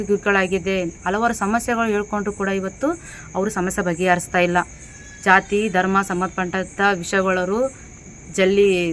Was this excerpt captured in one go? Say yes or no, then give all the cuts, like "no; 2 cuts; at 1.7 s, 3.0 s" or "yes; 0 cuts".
yes; 0 cuts